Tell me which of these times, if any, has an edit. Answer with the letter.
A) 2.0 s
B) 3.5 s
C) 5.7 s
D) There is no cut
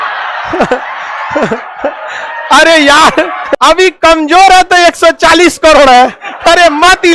B